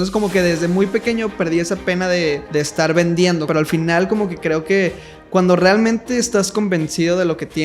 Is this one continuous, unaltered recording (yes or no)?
no